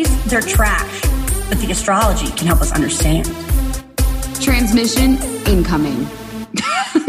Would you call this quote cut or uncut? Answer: uncut